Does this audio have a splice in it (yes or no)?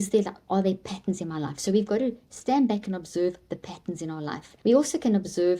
yes